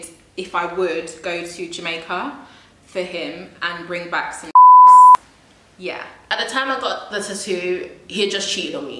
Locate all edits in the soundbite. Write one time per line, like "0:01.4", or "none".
0:06.3